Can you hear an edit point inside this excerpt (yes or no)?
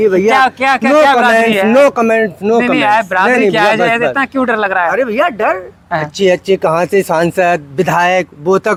no